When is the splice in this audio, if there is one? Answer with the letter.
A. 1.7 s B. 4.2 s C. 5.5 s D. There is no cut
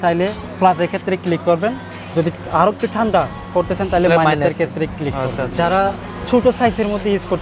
C